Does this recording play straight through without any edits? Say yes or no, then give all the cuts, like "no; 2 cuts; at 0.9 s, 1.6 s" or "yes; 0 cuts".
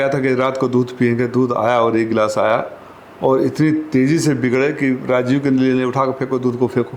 yes; 0 cuts